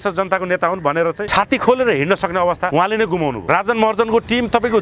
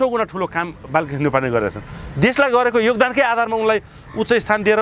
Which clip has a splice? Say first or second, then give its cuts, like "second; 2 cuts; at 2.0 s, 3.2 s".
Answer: first; 2 cuts; at 2.7 s, 3.5 s